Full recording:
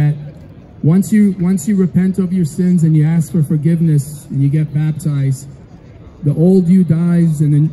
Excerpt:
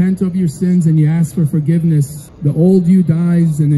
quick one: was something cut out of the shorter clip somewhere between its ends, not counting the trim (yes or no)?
yes